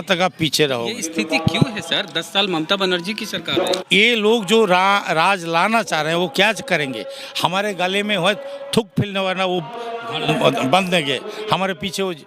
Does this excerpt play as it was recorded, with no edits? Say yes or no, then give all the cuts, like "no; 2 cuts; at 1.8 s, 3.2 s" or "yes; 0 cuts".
no; 1 cut; at 3.8 s